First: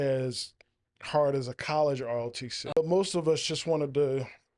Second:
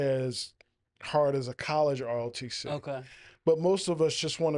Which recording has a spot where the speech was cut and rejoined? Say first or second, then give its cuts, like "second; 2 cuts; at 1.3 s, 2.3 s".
first; 1 cut; at 2.8 s